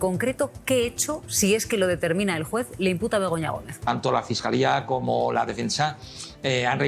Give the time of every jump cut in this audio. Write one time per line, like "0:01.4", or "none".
0:03.8